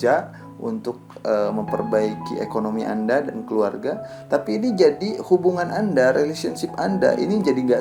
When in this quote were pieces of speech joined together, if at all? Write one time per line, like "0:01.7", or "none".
none

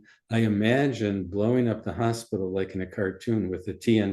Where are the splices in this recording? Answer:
none

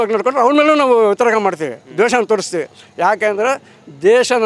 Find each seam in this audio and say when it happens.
none

